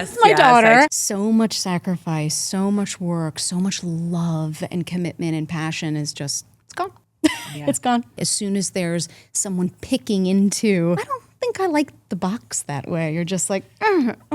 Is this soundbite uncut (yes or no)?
no